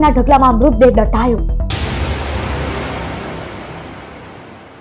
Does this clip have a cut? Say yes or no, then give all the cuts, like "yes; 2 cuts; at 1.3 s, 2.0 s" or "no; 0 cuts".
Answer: yes; 1 cut; at 1.7 s